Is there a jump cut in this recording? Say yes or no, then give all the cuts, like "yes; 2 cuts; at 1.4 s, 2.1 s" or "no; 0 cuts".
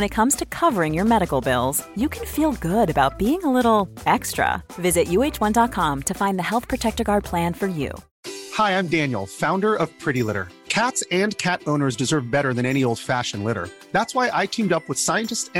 no; 0 cuts